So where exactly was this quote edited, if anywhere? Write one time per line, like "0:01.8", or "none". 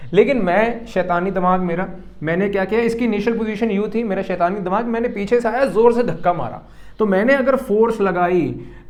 none